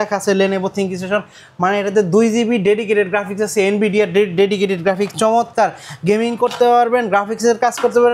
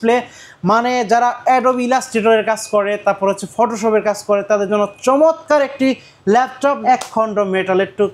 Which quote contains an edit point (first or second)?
second